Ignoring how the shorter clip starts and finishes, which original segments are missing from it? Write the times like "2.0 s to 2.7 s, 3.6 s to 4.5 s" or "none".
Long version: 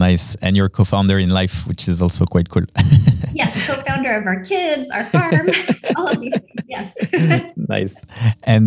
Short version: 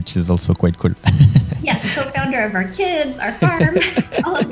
none